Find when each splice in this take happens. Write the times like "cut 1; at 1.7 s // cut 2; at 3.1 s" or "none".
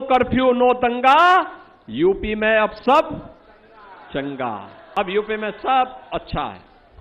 cut 1; at 4.8 s